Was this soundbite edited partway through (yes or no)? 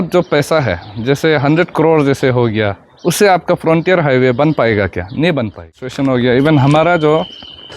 yes